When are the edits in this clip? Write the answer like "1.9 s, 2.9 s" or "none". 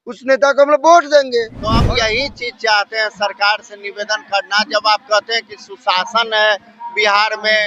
1.7 s

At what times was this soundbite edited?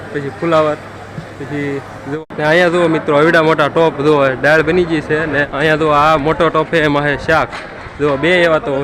2.2 s, 5.5 s, 7.8 s

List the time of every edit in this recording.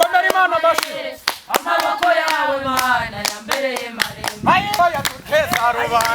4.8 s

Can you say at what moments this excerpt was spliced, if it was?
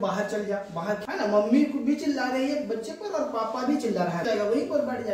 1.0 s, 4.2 s

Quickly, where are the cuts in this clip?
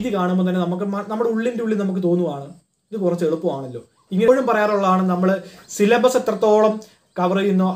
4.3 s

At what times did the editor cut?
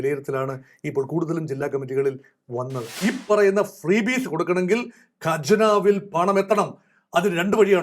2.9 s

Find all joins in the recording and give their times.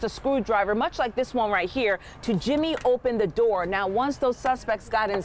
none

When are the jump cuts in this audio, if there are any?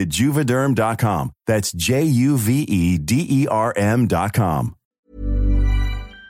4.8 s

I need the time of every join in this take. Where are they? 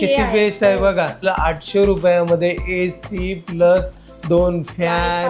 1.2 s

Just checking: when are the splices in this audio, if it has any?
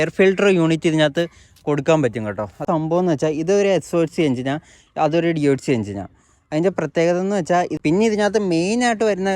2.6 s, 7.7 s

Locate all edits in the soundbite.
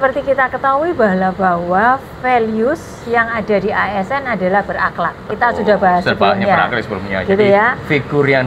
none

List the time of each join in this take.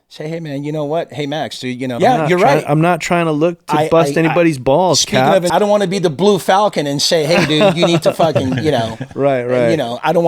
2.0 s, 5.5 s

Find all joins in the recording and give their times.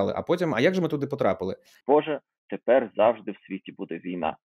1.7 s

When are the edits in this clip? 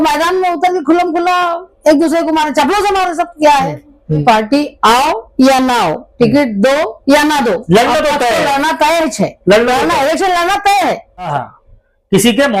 4.2 s, 11.3 s

